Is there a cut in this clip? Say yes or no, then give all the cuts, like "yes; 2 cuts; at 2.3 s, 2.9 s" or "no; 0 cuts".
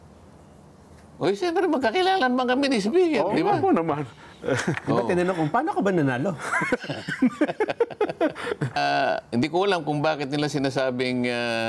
yes; 1 cut; at 8.8 s